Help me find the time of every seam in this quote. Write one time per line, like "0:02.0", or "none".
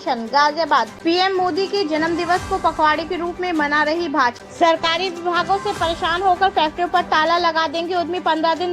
0:00.9
0:04.4